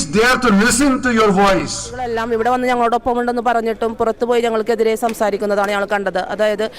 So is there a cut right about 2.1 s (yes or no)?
yes